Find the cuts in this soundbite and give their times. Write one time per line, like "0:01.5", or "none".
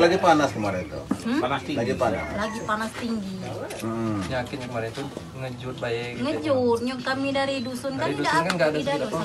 none